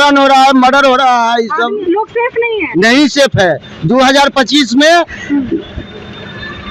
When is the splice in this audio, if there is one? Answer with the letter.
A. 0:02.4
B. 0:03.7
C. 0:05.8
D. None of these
D